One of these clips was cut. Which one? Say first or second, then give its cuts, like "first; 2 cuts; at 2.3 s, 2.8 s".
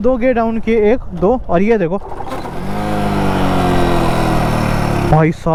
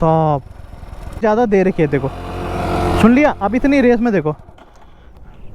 second; 1 cut; at 1.2 s